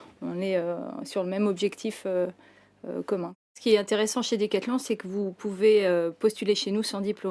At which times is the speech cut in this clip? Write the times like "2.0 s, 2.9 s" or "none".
3.6 s

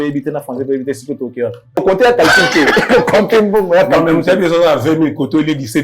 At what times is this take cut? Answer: 1.8 s

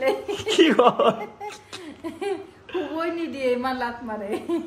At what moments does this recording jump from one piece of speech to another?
none

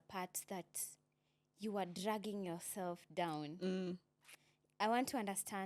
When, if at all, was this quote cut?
none

